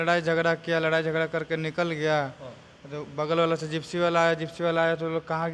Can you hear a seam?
no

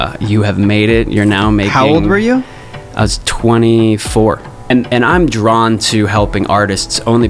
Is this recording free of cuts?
no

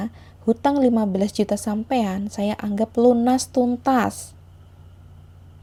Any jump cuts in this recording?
no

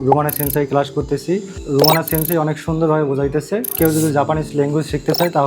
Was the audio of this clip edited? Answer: yes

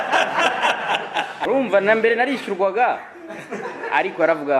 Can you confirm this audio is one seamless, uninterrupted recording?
no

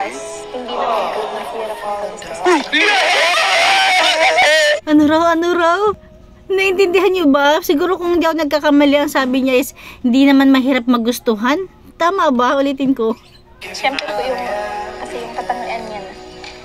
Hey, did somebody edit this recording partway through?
no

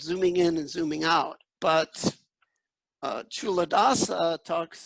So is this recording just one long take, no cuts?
no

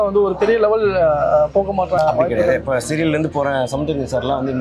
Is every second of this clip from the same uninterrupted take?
no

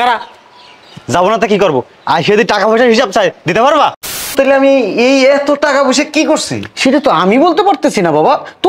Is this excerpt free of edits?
no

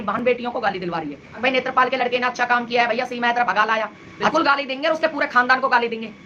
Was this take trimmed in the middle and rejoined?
yes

